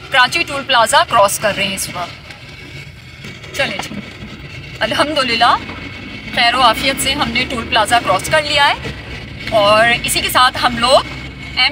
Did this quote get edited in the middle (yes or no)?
no